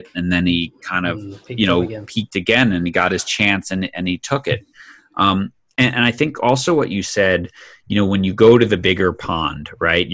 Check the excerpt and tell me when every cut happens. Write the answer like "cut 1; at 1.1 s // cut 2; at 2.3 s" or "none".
none